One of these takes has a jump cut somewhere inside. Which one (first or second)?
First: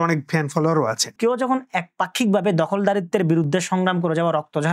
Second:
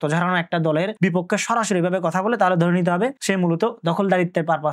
first